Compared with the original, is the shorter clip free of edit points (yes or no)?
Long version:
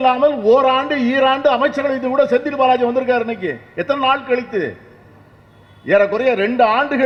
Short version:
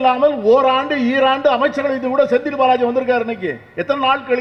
yes